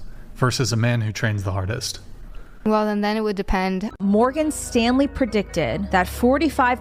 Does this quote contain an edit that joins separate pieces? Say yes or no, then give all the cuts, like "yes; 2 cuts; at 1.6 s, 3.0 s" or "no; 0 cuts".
yes; 1 cut; at 3.9 s